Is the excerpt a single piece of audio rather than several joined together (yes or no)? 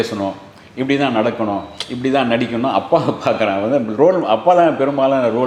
yes